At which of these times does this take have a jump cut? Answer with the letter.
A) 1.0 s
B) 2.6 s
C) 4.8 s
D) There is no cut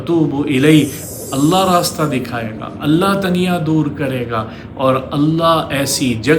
A